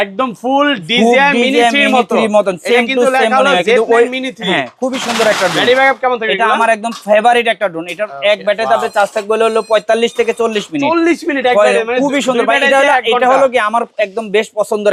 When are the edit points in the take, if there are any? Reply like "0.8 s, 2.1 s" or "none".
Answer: none